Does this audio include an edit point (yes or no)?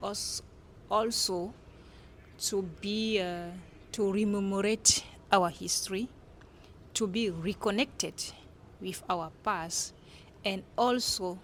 no